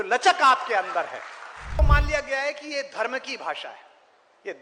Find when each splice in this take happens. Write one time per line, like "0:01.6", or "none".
0:01.8